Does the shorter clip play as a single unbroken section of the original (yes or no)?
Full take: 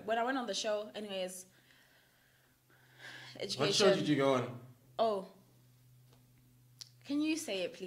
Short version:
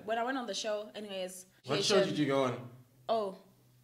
no